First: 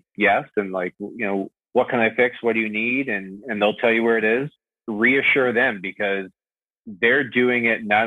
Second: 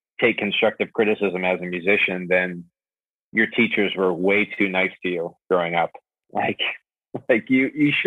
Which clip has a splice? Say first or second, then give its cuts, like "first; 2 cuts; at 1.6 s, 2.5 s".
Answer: first; 2 cuts; at 1.5 s, 4.7 s